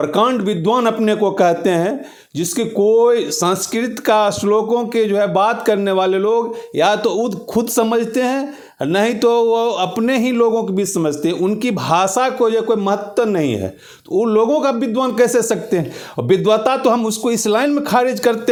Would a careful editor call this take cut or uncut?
uncut